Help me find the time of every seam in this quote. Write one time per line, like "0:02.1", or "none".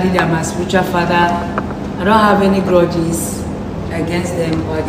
none